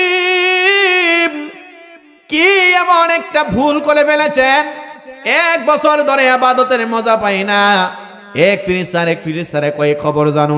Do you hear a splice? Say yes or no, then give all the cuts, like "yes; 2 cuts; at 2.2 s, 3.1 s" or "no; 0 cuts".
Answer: no; 0 cuts